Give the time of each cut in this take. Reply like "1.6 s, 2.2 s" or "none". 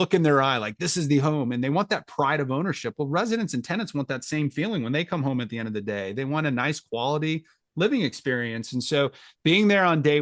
none